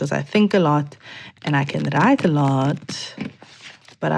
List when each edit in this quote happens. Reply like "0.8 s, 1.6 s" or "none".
none